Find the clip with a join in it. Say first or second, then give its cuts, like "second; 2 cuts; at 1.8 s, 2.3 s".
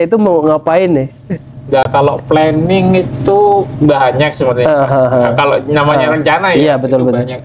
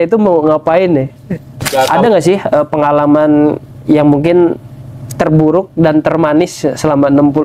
second; 1 cut; at 1.9 s